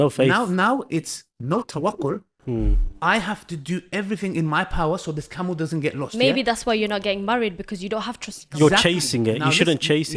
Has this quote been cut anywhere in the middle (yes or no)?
no